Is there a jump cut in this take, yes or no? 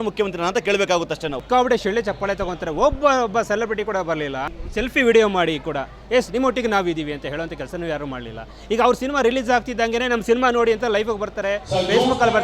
yes